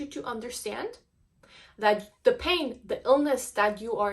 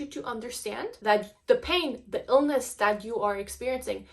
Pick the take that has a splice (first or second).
second